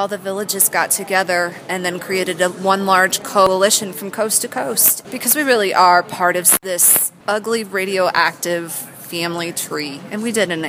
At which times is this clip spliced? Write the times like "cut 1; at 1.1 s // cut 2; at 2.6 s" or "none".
cut 1; at 3.5 s // cut 2; at 4.9 s // cut 3; at 6.7 s